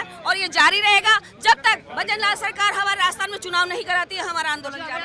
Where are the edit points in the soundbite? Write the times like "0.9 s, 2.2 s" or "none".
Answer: none